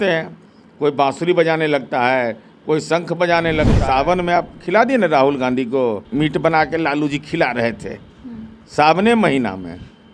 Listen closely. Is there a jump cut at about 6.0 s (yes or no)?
yes